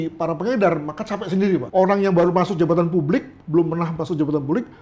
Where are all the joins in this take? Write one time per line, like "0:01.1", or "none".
0:01.7